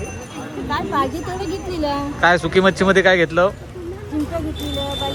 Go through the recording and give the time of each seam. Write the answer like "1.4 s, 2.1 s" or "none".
none